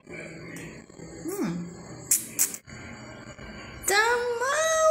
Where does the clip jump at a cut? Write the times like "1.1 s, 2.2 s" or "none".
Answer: 2.6 s